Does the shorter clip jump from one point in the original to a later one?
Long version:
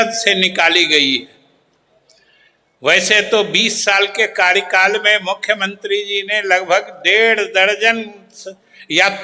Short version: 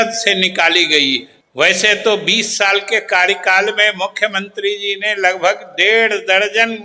yes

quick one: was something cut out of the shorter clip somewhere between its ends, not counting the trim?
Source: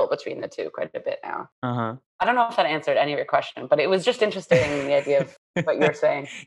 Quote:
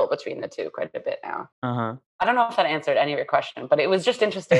no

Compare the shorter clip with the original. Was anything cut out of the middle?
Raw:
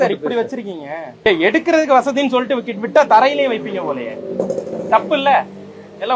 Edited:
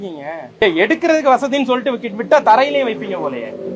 no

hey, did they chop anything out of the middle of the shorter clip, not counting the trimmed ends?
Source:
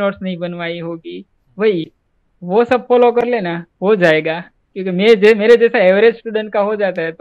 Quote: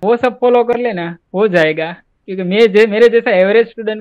no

